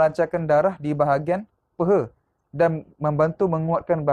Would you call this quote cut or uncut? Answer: uncut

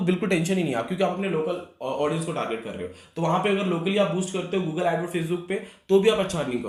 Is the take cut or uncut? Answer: uncut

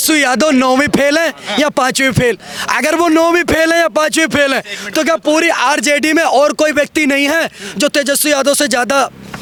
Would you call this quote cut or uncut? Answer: uncut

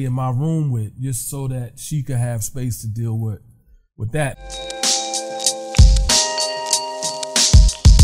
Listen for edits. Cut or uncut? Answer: cut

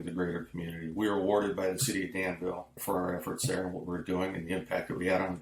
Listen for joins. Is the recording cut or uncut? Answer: uncut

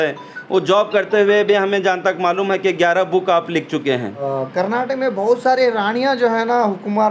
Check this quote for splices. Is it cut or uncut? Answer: cut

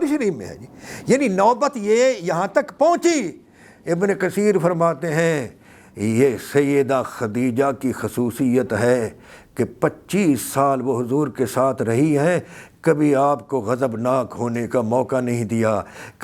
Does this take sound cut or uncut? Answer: uncut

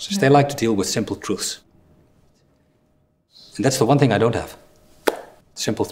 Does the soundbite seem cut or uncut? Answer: cut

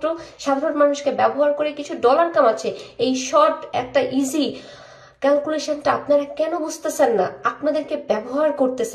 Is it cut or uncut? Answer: uncut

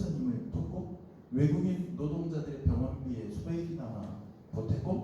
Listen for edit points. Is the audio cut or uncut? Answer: uncut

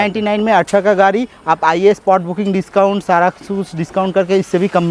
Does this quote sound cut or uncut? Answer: uncut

